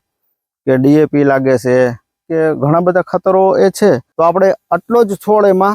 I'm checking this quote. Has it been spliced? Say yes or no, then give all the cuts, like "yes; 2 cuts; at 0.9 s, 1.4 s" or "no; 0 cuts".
yes; 1 cut; at 4.1 s